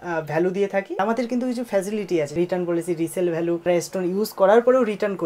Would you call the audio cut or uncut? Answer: cut